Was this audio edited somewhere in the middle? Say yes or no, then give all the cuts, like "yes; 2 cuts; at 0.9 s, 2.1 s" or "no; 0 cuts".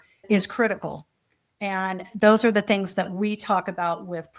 no; 0 cuts